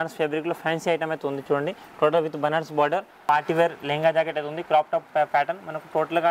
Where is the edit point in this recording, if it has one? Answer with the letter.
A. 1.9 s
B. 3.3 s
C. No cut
B